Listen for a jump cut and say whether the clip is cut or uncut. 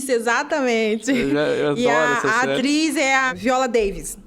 cut